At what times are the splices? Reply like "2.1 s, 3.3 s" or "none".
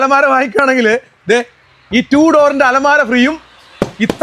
none